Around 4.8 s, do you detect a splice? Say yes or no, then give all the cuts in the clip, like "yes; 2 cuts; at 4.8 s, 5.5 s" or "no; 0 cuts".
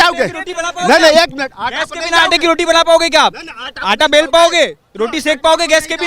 no; 0 cuts